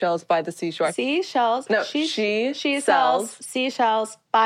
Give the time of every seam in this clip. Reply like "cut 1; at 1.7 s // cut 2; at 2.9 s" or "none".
cut 1; at 0.9 s

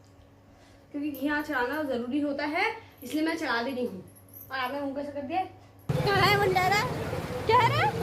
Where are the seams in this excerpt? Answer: cut 1; at 5.9 s

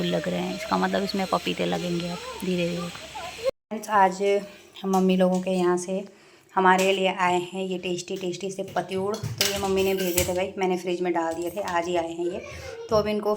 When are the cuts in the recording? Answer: cut 1; at 3.5 s

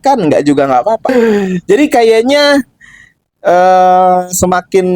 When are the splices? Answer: cut 1; at 1.1 s

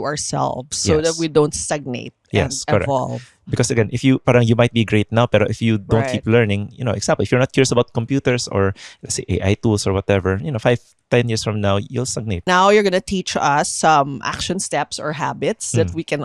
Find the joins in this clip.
cut 1; at 12.4 s

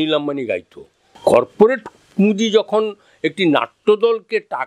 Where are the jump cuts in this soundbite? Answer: cut 1; at 1.0 s

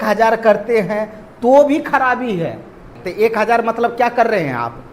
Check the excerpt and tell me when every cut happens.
cut 1; at 3.0 s

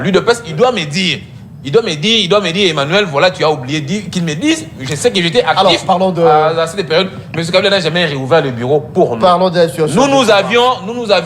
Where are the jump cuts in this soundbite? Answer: none

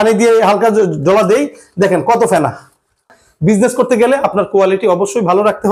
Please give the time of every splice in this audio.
cut 1; at 3.1 s

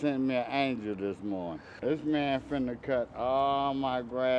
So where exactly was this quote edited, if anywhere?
cut 1; at 1.7 s

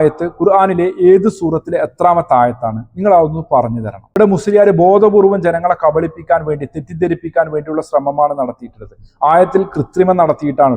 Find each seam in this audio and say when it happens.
none

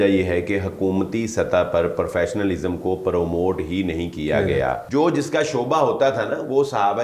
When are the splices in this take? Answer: cut 1; at 4.8 s

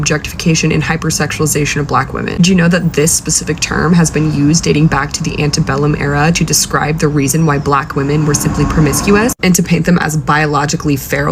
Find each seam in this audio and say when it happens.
none

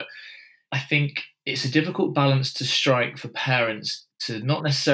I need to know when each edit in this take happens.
none

